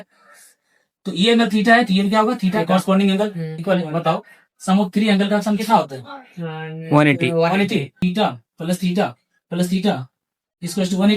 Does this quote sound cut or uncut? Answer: cut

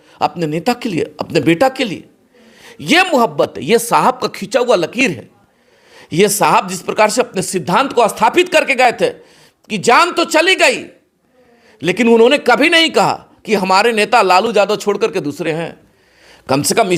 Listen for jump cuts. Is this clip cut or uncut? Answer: uncut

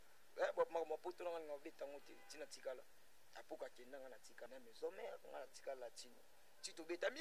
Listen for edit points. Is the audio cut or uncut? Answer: cut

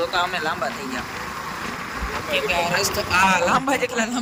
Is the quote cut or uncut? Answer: uncut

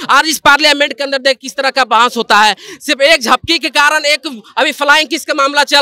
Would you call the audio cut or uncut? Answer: uncut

